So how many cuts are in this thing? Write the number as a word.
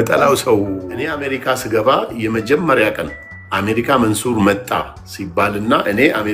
one